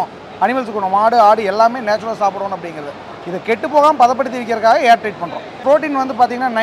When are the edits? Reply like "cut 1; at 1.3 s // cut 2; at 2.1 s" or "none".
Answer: cut 1; at 5.6 s